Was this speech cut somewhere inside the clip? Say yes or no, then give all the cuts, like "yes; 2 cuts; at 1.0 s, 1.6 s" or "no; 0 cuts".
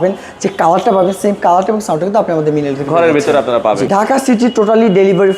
yes; 1 cut; at 3.9 s